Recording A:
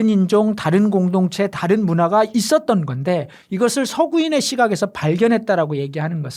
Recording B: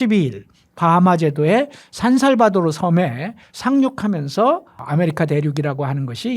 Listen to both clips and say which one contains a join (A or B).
B